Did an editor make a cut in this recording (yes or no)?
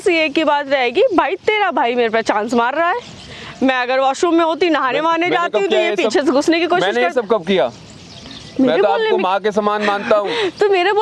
no